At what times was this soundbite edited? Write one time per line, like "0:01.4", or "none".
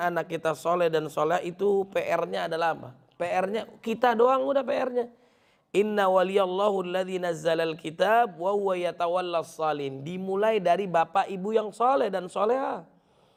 none